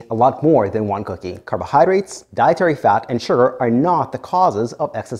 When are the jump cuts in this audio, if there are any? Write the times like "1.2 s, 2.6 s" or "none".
1.4 s, 2.2 s